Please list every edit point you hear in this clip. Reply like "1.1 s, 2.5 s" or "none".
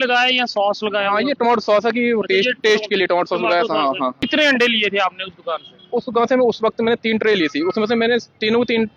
4.2 s